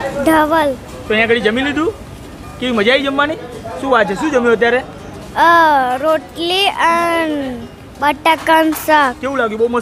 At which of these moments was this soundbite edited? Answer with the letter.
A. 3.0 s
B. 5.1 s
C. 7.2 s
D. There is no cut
D